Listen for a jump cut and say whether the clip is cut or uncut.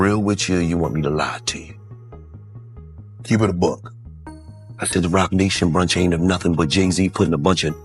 uncut